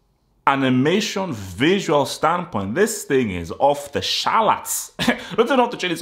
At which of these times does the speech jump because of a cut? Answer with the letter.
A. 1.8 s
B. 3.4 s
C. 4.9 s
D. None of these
D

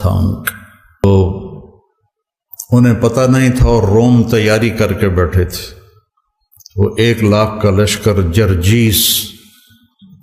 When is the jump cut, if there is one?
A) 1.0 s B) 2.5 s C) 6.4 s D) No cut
A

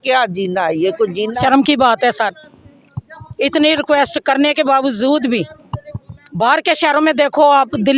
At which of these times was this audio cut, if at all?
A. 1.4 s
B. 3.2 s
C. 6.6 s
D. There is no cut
A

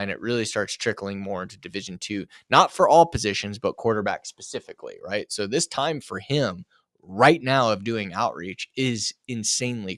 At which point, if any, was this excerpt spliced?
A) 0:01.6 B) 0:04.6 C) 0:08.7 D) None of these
D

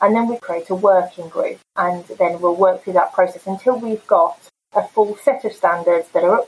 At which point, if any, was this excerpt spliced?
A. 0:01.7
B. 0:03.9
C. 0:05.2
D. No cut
A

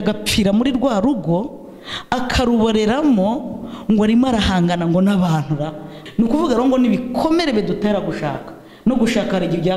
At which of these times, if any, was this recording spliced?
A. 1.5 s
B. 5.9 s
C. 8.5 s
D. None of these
B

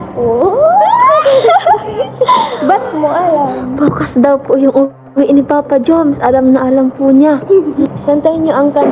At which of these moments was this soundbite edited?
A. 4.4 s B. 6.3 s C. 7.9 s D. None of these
C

